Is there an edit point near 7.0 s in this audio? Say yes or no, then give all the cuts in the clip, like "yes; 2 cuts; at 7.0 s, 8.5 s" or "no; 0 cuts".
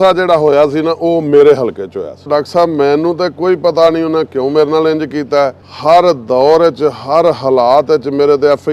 no; 2 cuts; at 2.3 s, 5.7 s